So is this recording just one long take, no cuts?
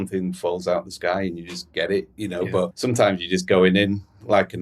no; 1 cut; at 2.7 s

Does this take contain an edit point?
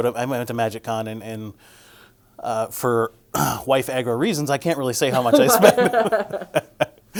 no; 0 cuts

